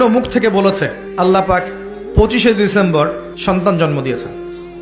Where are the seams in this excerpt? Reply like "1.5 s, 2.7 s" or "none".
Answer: 1.0 s, 3.3 s